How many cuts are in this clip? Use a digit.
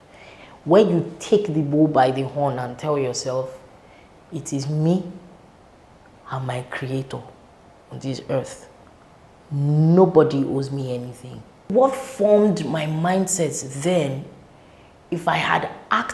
1